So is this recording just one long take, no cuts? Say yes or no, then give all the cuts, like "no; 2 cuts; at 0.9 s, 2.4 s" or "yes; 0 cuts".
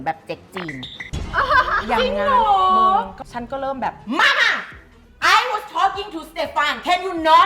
no; 1 cut; at 3.2 s